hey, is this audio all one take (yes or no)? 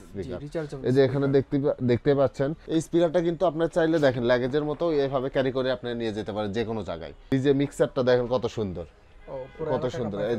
no